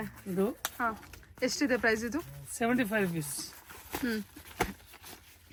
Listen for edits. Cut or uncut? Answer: uncut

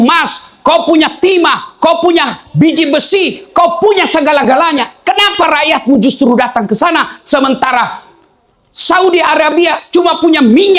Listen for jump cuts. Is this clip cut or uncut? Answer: uncut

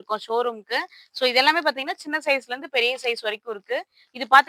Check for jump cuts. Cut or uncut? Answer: uncut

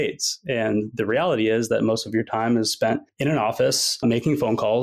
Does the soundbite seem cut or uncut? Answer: uncut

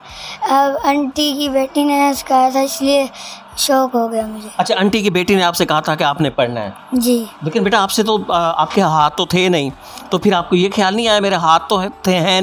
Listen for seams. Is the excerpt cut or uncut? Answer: uncut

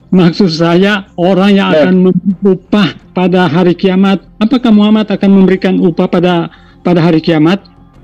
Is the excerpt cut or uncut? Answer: uncut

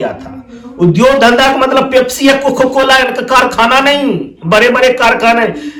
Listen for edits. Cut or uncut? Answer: uncut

